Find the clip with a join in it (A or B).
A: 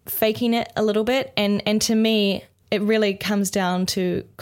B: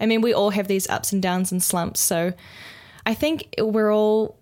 B